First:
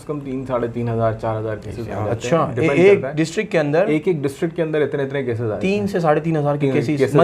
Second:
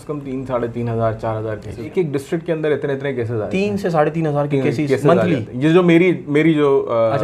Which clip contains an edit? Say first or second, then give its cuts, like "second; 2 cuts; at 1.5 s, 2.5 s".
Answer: second; 1 cut; at 1.9 s